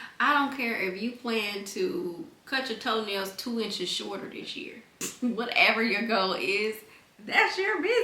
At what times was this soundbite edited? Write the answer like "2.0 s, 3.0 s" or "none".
5.0 s

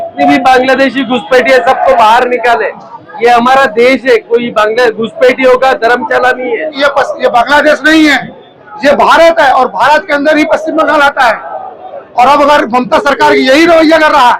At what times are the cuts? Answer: 6.7 s

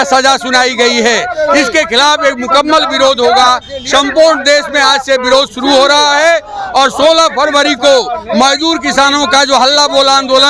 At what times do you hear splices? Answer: none

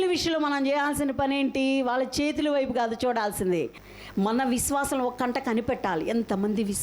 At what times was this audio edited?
3.8 s

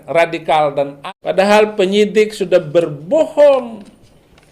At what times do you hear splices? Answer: 1.0 s

